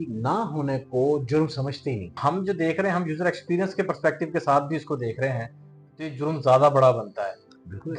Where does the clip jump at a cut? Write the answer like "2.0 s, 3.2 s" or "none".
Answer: 2.2 s